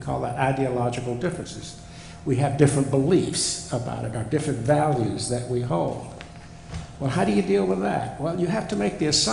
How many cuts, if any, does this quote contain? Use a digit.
0